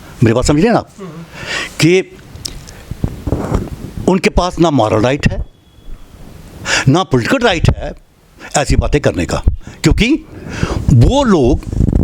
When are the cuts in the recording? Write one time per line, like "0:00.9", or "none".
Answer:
none